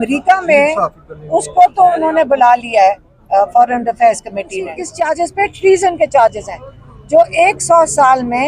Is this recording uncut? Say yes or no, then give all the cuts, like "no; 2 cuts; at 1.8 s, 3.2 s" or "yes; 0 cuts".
no; 1 cut; at 4.8 s